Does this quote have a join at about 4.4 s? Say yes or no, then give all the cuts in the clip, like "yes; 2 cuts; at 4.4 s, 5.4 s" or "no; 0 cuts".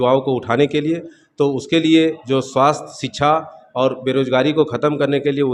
no; 0 cuts